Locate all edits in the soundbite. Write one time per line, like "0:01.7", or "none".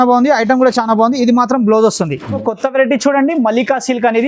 0:02.3